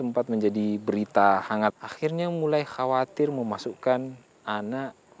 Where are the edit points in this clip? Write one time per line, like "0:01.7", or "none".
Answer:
0:01.9